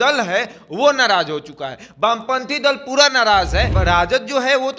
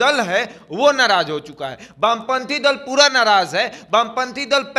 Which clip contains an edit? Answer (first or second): first